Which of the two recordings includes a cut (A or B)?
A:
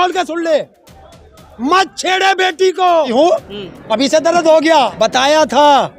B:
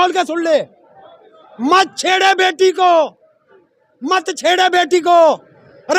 A